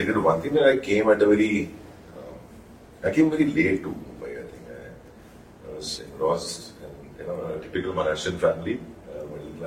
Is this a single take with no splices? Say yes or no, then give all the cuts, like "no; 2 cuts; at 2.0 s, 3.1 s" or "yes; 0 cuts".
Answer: yes; 0 cuts